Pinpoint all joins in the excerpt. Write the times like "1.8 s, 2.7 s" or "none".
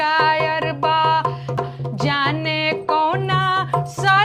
1.6 s